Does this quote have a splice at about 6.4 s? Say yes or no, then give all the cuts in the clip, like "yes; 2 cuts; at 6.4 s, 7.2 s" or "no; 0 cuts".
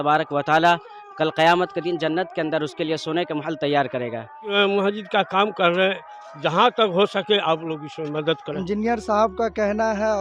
no; 2 cuts; at 4.5 s, 8.5 s